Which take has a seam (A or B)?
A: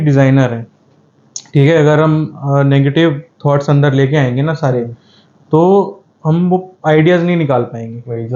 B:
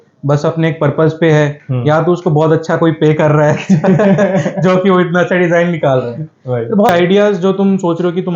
B